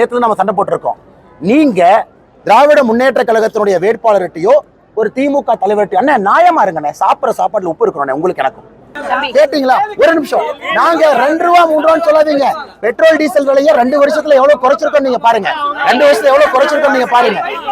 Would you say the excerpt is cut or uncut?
cut